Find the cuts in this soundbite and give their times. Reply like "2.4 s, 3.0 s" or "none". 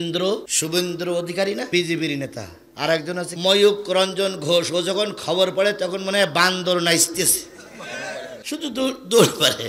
3.4 s